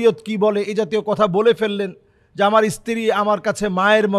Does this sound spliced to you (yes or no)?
no